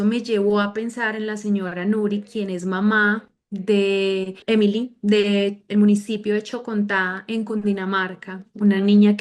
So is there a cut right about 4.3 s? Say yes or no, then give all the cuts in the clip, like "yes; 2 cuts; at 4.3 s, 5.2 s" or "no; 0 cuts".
yes; 1 cut; at 4.3 s